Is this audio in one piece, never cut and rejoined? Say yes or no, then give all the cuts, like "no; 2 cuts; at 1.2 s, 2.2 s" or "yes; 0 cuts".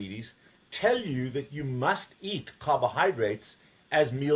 yes; 0 cuts